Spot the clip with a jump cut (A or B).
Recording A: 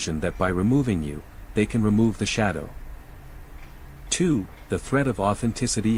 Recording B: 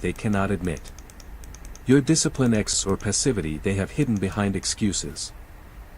B